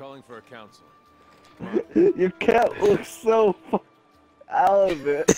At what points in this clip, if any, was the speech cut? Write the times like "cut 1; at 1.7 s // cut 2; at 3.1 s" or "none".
none